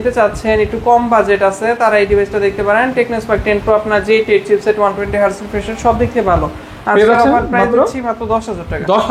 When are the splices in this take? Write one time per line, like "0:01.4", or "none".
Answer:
none